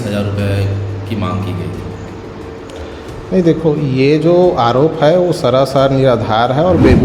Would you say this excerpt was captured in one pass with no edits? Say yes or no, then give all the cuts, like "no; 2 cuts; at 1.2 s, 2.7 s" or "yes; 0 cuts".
yes; 0 cuts